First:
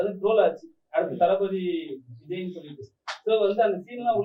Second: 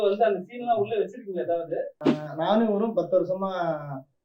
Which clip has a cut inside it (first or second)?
second